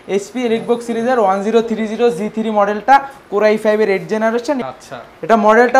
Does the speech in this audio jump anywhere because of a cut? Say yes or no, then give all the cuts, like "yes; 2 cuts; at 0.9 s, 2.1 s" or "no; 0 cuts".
yes; 1 cut; at 4.7 s